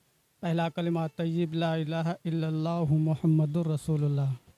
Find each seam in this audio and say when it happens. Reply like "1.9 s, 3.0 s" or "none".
none